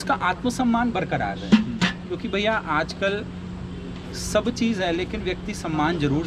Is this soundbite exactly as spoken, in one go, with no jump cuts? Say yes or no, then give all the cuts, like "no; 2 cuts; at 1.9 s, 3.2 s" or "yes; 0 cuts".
yes; 0 cuts